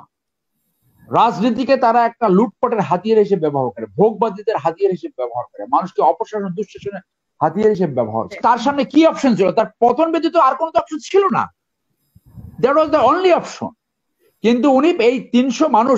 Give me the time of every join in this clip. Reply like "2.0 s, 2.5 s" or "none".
8.3 s